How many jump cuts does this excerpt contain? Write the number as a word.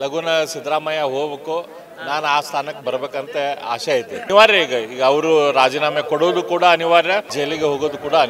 two